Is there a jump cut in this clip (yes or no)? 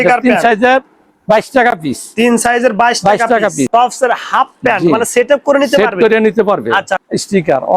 yes